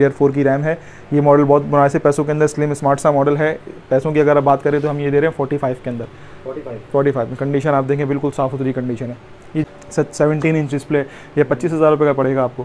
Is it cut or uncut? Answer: cut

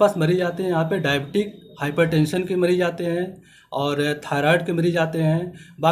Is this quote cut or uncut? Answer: uncut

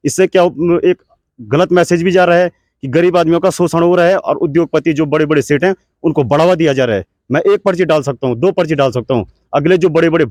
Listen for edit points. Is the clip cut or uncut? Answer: uncut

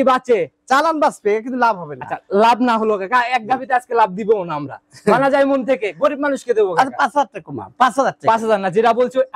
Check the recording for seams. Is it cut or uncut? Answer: uncut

